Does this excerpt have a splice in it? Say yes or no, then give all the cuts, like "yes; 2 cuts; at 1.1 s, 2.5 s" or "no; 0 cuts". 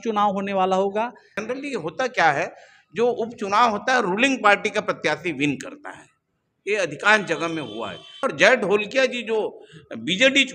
yes; 2 cuts; at 1.4 s, 8.2 s